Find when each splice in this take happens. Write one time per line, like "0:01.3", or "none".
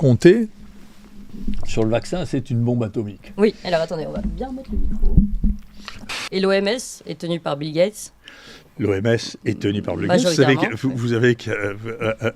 0:06.1

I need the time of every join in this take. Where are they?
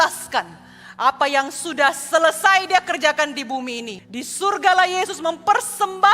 0:03.9

